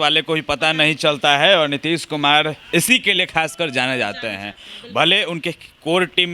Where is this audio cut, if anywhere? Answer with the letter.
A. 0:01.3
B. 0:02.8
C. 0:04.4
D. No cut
D